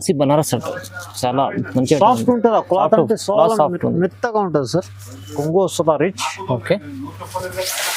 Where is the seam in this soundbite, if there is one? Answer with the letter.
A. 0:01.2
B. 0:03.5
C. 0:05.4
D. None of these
C